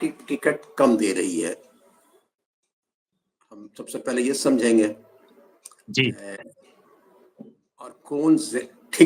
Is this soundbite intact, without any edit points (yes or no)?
yes